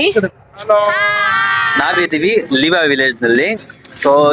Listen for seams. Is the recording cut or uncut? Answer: cut